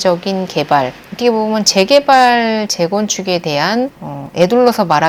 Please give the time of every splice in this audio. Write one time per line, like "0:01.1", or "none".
none